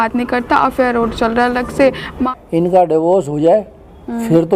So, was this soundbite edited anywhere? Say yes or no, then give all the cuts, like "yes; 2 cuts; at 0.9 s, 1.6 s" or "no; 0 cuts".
yes; 1 cut; at 2.2 s